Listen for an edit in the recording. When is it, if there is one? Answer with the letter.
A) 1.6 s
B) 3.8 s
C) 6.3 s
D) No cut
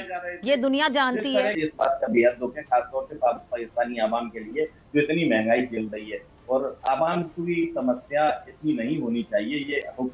A